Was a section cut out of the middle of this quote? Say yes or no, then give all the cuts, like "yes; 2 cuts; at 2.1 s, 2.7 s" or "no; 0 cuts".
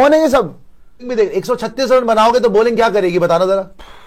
yes; 1 cut; at 1.1 s